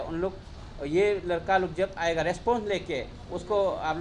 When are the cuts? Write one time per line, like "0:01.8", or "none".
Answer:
none